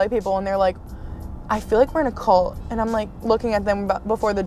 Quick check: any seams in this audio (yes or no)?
no